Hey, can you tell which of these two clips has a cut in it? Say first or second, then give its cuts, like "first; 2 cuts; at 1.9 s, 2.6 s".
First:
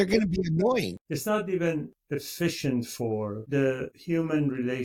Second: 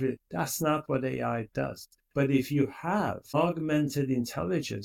first; 2 cuts; at 1.0 s, 3.4 s